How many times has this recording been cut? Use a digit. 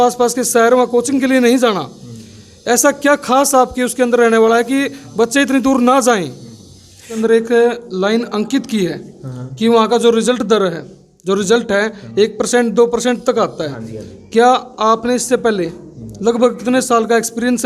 1